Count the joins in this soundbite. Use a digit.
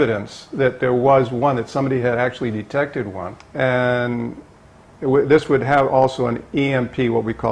1